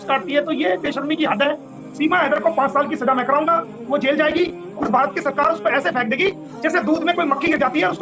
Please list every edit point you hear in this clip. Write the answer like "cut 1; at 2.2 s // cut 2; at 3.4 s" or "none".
cut 1; at 1.8 s // cut 2; at 4.7 s